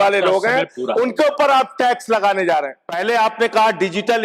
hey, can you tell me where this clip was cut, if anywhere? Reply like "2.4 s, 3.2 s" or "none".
2.8 s